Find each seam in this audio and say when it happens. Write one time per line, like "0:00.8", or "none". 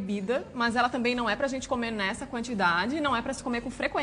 none